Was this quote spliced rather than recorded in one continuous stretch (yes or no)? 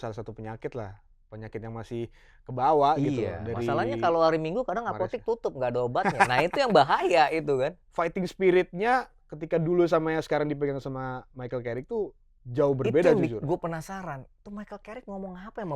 yes